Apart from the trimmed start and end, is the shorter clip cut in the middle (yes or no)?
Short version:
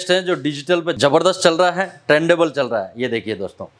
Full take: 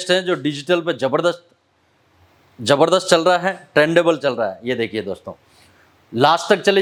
yes